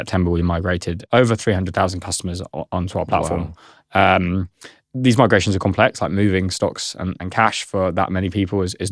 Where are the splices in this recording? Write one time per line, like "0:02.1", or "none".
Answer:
0:00.9